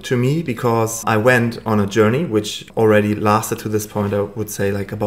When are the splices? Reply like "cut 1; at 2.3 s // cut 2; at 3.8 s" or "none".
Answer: cut 1; at 1.0 s // cut 2; at 2.6 s